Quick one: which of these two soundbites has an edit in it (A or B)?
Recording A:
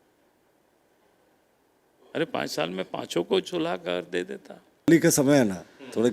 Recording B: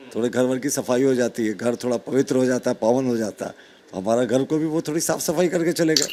A